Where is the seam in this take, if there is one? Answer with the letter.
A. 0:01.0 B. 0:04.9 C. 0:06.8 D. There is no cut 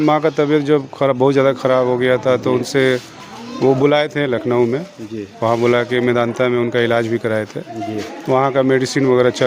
D